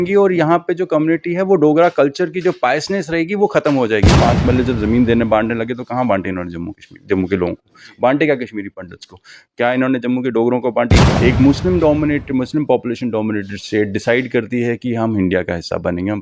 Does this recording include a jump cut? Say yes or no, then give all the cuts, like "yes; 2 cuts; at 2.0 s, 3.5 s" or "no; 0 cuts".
yes; 2 cuts; at 4.2 s, 11.0 s